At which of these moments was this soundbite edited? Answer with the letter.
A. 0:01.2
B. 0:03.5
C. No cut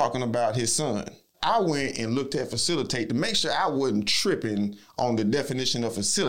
A